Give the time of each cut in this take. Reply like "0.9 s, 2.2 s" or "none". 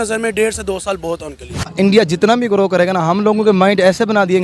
1.6 s